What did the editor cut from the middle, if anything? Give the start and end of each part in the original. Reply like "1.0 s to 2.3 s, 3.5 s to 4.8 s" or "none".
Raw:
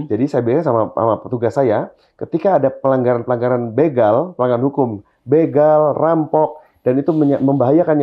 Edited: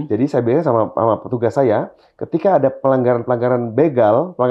none